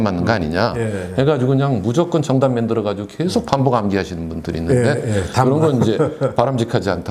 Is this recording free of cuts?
yes; 0 cuts

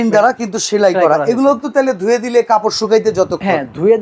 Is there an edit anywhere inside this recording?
no; 0 cuts

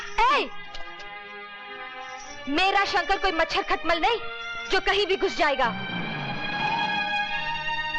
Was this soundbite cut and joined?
no; 0 cuts

